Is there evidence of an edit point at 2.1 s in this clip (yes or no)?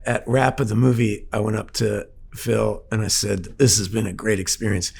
no